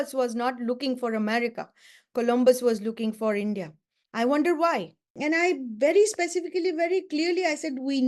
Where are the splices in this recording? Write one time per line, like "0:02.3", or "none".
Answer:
0:05.2